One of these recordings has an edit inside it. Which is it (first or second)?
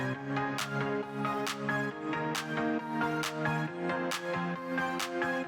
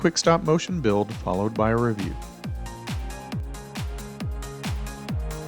second